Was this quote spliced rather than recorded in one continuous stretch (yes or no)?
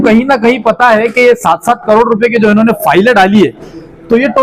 no